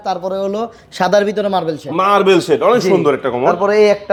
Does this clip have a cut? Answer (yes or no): no